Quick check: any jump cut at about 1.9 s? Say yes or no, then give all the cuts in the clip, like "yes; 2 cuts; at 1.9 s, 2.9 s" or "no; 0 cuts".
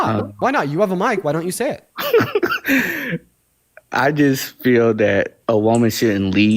yes; 2 cuts; at 1.9 s, 5.4 s